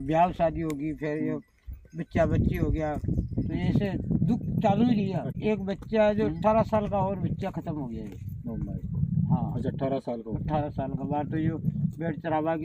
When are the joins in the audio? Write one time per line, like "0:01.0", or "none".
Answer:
0:05.3